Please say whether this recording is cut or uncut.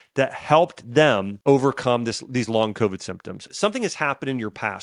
cut